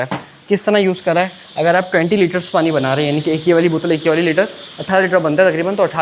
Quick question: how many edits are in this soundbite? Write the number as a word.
zero